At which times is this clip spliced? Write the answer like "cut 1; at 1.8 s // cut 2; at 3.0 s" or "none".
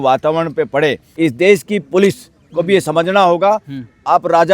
cut 1; at 1.1 s

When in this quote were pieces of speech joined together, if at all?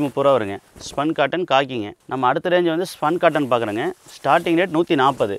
cut 1; at 2.0 s

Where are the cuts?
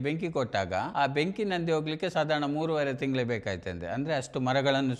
none

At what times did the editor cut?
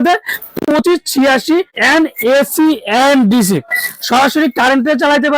cut 1; at 1.7 s

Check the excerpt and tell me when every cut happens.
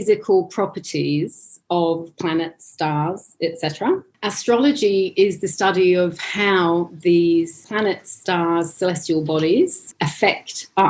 cut 1; at 4.1 s // cut 2; at 7.6 s // cut 3; at 9.8 s

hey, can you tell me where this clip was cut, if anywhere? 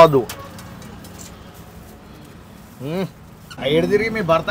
cut 1; at 3.6 s

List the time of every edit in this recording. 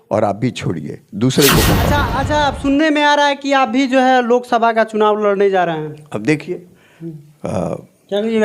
cut 1; at 2.1 s

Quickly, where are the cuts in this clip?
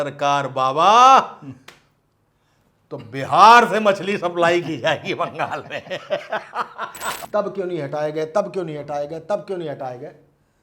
cut 1; at 7.2 s

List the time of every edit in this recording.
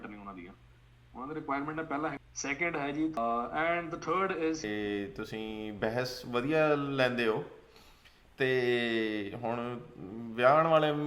cut 1; at 2.2 s // cut 2; at 3.2 s // cut 3; at 4.6 s

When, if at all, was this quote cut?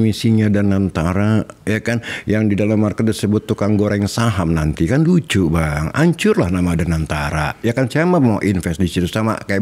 none

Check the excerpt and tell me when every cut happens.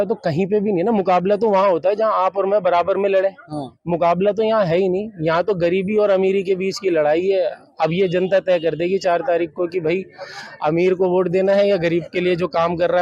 none

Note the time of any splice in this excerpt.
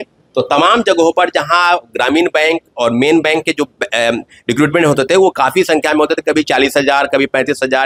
none

